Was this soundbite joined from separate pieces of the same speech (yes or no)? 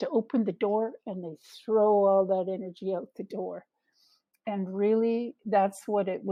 no